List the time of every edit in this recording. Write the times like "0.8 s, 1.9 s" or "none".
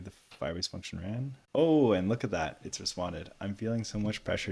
1.4 s